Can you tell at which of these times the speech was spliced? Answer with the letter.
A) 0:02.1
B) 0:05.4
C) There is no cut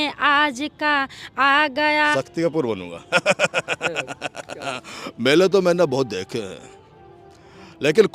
A